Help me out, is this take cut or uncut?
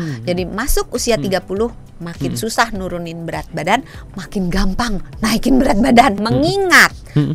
cut